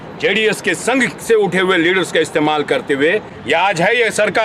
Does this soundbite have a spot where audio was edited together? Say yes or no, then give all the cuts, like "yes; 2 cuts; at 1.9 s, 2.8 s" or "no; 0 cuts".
yes; 1 cut; at 3.3 s